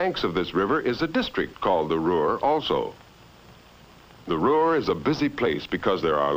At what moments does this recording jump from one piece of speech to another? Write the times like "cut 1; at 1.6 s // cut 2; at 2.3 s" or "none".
none